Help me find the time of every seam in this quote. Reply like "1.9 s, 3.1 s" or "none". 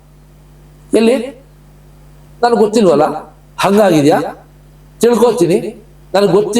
none